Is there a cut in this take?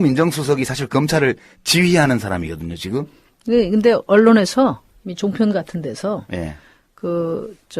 yes; 1 cut; at 6.1 s

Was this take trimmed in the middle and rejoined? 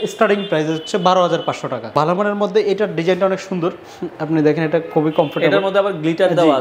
yes; 1 cut; at 1.9 s

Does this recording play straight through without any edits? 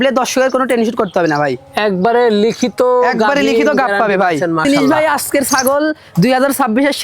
no; 1 cut; at 4.6 s

